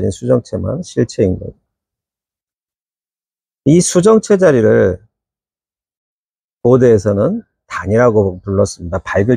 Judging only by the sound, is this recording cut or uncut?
uncut